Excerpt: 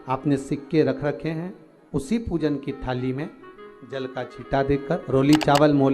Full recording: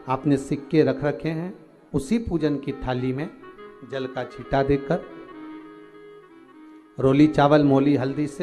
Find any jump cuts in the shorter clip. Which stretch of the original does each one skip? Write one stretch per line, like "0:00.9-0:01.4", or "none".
0:05.0-0:06.9